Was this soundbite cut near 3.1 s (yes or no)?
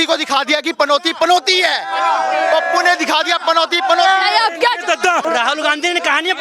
no